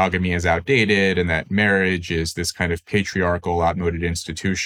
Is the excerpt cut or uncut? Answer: uncut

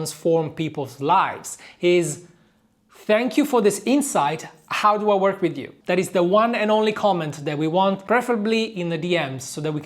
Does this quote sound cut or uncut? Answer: cut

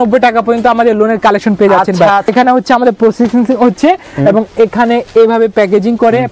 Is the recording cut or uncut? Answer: cut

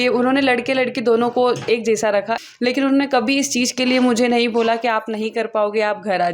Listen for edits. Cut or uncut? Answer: cut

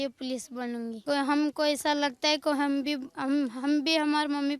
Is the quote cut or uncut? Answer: cut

